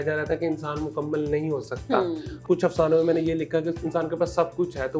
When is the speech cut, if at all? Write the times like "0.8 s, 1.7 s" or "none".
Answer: 2.4 s